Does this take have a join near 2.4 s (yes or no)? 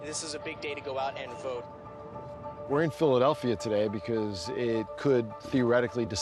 yes